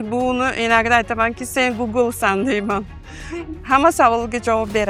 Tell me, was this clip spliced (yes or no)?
no